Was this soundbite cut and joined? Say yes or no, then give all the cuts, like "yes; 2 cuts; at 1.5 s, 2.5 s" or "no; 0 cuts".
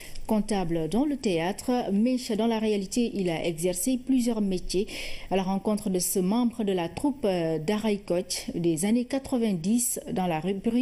no; 0 cuts